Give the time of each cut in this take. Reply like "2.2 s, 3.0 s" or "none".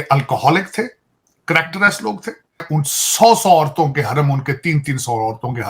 2.7 s